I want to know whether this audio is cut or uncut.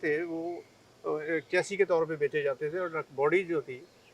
uncut